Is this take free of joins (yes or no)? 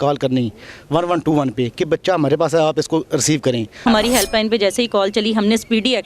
no